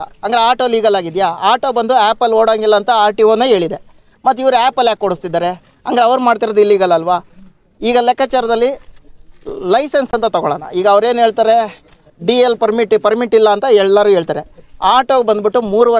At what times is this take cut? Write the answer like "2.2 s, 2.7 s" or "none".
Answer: none